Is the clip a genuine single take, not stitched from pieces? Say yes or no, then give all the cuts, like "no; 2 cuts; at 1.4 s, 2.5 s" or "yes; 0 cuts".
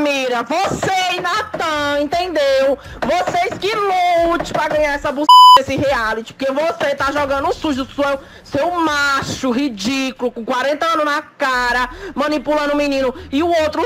yes; 0 cuts